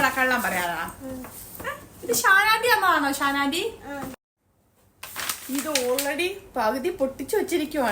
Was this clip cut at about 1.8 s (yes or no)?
no